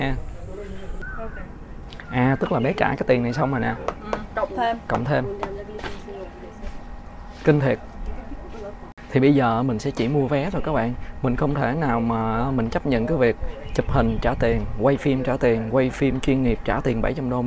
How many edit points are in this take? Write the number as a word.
two